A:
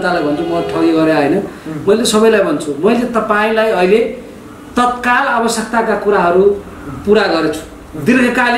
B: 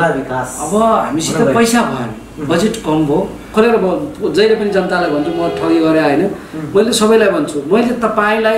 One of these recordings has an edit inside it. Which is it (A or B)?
B